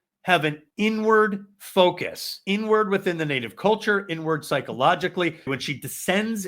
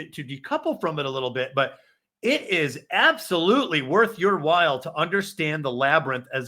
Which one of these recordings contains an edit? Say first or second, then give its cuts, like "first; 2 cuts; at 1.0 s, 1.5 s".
first; 2 cuts; at 2.4 s, 5.5 s